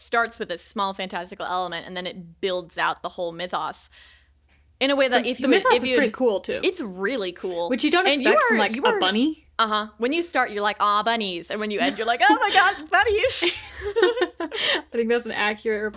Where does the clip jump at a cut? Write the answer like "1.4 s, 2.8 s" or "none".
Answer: none